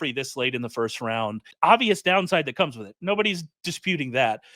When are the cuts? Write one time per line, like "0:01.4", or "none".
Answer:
0:01.5